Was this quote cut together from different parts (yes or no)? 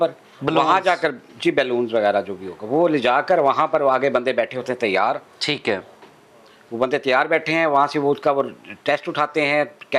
no